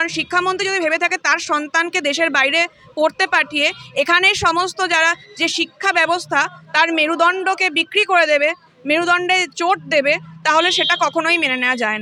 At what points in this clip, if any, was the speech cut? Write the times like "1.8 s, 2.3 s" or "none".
none